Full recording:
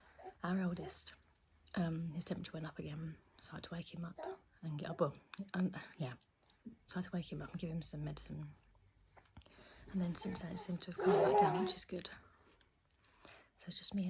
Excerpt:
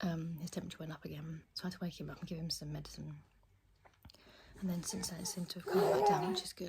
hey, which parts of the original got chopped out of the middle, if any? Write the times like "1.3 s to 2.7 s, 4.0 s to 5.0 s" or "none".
3.2 s to 6.8 s